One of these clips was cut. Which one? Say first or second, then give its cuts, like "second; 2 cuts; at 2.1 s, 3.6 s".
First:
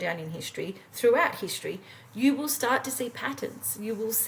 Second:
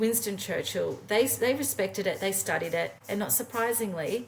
second; 1 cut; at 3.0 s